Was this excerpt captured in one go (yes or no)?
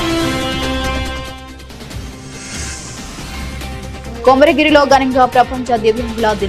no